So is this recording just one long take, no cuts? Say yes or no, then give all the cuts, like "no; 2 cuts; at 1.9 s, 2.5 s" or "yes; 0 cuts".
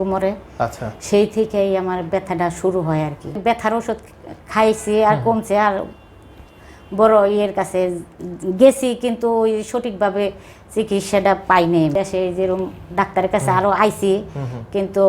no; 2 cuts; at 3.4 s, 11.9 s